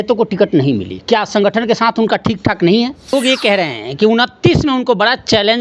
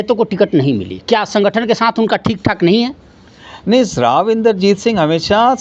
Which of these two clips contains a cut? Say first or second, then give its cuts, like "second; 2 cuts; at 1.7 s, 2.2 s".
first; 1 cut; at 3.1 s